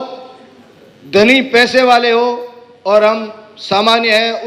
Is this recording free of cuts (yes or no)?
yes